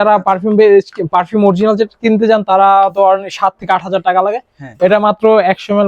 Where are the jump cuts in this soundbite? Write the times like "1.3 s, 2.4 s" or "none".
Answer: none

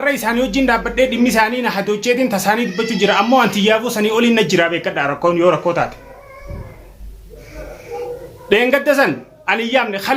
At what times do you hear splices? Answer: none

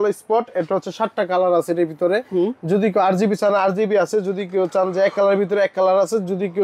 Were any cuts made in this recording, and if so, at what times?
none

